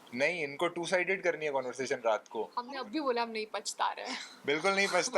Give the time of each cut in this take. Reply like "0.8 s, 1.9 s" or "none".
2.6 s